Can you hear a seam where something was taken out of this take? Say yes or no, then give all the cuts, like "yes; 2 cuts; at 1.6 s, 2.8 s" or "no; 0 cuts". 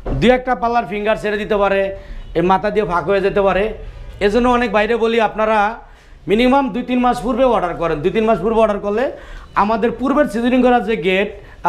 no; 0 cuts